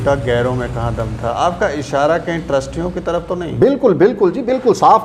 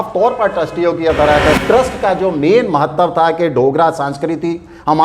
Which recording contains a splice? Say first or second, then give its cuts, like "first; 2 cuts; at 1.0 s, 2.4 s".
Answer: second; 1 cut; at 1.6 s